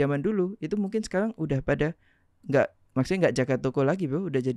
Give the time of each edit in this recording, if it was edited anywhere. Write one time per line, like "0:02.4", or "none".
none